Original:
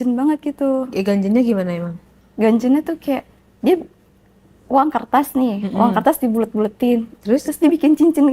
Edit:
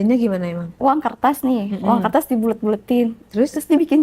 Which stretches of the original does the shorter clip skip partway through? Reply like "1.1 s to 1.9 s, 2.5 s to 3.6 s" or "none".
2.3 s to 5.0 s